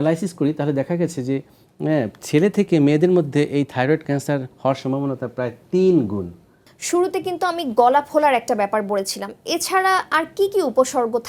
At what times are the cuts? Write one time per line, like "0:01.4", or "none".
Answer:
none